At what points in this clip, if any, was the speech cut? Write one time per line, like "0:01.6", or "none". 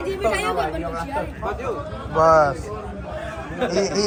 none